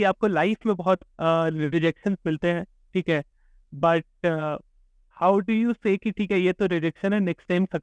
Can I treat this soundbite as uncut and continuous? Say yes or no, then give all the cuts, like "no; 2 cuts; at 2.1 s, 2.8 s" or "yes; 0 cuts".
yes; 0 cuts